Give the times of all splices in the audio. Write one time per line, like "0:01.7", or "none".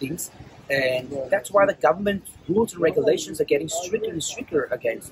none